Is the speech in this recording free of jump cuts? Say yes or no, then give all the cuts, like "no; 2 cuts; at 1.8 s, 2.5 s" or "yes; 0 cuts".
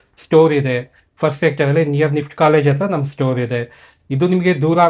yes; 0 cuts